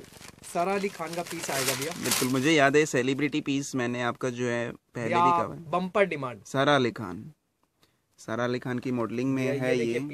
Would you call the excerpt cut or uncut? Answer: uncut